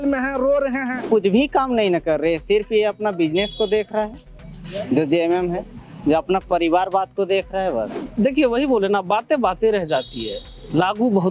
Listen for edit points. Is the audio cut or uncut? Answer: cut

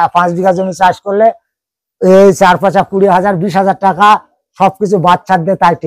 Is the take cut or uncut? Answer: uncut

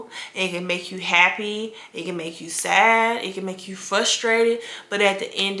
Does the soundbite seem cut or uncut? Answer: uncut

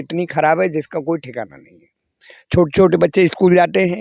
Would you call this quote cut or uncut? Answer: uncut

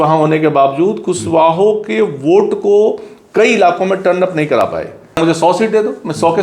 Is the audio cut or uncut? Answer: cut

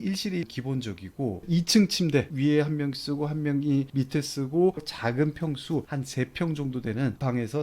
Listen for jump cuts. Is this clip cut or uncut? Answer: cut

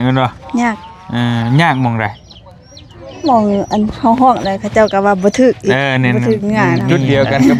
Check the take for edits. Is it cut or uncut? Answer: uncut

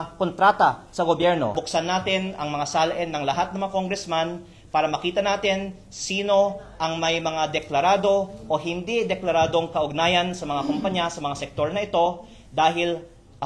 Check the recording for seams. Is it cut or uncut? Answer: cut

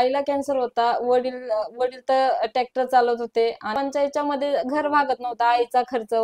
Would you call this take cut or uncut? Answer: cut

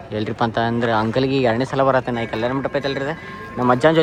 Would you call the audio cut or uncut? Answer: uncut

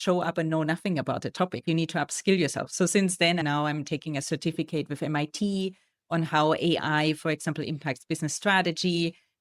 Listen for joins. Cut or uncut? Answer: cut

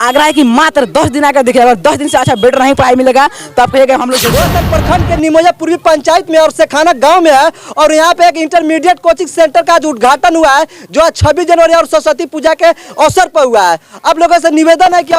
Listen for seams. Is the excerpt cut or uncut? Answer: cut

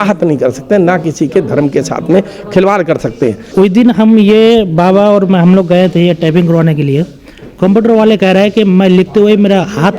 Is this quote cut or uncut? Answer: cut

